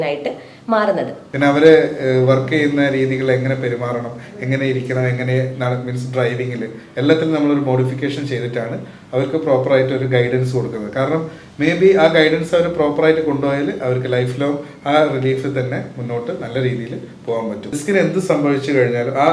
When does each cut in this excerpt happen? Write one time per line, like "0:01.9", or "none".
0:01.2
0:17.8